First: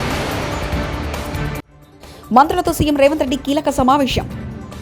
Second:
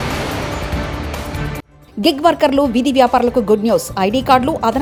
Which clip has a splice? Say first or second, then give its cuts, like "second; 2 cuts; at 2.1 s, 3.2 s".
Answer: first; 1 cut; at 1.8 s